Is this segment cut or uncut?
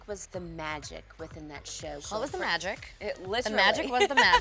uncut